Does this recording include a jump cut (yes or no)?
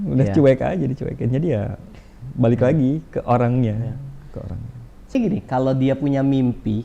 yes